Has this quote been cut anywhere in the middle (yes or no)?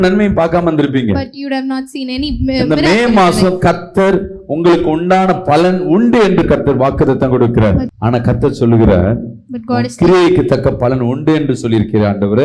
yes